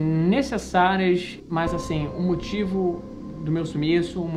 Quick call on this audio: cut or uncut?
cut